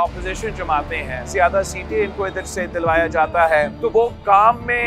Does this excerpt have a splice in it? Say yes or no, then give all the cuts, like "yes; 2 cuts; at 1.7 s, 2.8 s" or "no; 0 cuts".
yes; 2 cuts; at 1.3 s, 3.7 s